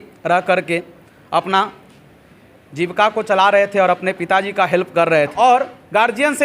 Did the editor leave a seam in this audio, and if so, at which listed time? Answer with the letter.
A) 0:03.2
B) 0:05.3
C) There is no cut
B